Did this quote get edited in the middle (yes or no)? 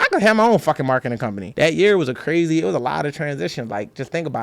yes